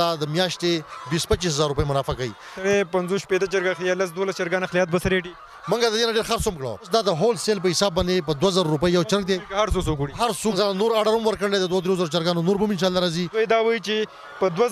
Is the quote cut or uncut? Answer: cut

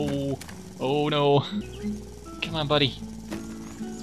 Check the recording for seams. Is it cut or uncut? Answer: cut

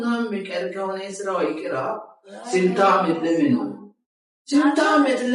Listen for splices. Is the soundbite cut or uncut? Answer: uncut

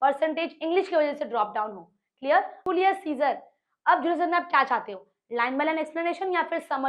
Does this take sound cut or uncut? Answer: cut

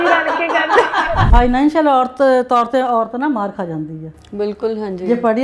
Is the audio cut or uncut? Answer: cut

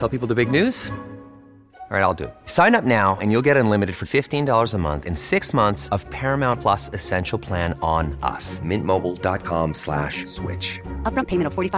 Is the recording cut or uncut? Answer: uncut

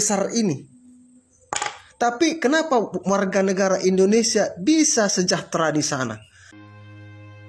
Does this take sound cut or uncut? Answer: cut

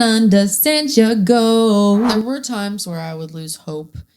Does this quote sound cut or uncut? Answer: cut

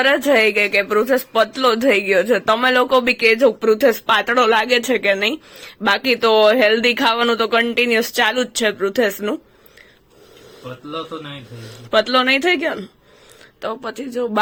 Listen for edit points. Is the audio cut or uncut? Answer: uncut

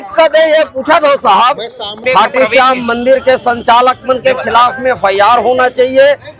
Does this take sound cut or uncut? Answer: cut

